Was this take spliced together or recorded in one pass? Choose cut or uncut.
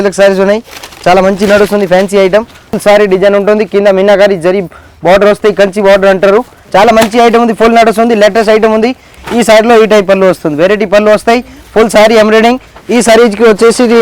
cut